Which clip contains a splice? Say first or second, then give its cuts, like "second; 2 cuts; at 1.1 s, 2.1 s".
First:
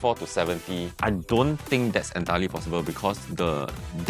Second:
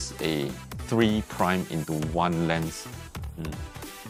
first; 1 cut; at 0.9 s